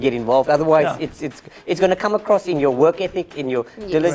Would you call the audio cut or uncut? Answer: uncut